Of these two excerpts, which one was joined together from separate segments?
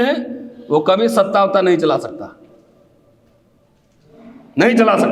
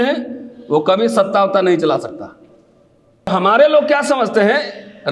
second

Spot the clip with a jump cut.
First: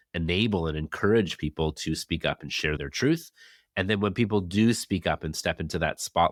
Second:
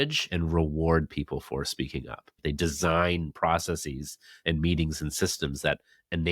second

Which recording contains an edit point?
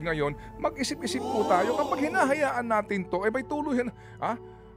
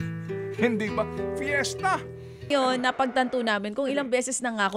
second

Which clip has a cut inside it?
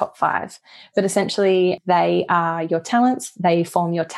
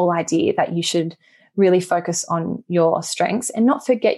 first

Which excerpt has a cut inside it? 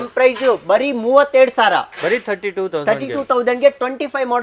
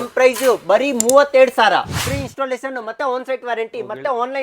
second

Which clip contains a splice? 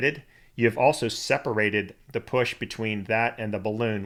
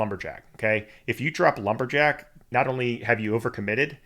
second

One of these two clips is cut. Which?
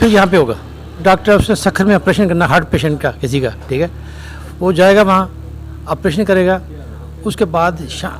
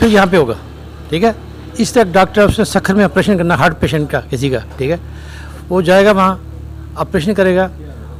first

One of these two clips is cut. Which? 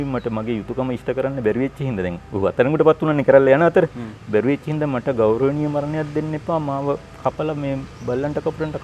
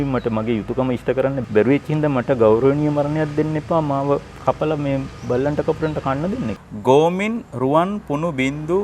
second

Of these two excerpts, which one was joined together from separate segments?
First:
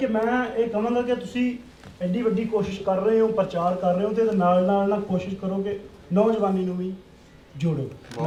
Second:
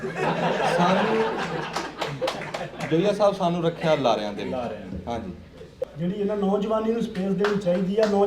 second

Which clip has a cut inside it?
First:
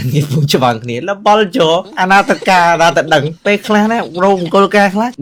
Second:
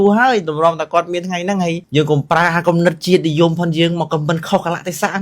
second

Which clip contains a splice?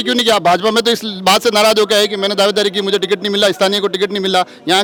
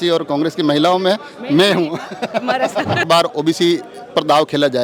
second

